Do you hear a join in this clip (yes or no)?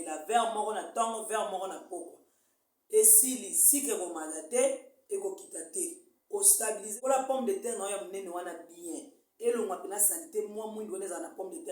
yes